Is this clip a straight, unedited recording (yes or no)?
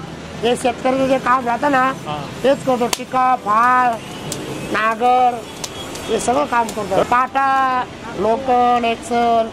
no